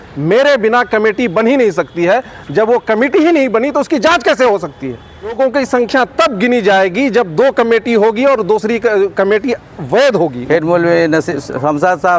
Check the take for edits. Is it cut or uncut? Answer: cut